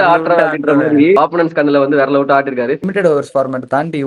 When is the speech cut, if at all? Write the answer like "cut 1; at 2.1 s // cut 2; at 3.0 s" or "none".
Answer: cut 1; at 1.2 s // cut 2; at 2.8 s